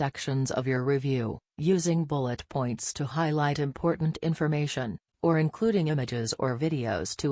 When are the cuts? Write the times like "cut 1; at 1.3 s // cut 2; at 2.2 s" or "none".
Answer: none